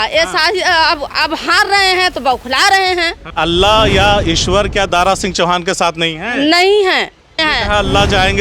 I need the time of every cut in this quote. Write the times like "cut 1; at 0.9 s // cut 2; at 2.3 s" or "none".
cut 1; at 3.3 s // cut 2; at 7.4 s